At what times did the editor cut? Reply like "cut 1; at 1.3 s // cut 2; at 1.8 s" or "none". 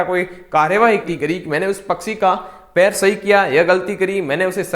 cut 1; at 1.1 s